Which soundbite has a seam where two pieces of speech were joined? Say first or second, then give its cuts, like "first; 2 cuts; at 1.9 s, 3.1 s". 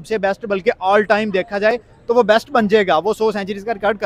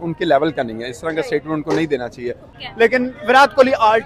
second; 1 cut; at 2.5 s